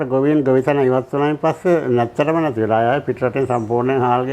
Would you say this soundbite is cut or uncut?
uncut